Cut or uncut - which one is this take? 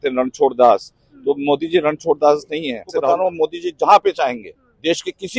cut